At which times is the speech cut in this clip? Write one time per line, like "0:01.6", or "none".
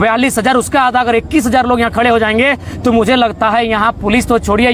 none